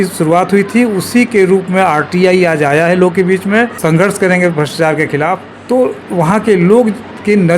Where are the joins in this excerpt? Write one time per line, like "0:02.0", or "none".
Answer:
0:03.8
0:05.5